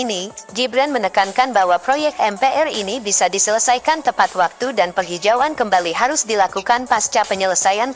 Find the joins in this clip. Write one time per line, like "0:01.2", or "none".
none